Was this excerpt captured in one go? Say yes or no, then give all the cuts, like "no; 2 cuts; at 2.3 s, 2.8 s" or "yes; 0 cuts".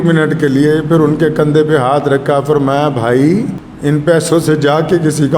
no; 1 cut; at 3.6 s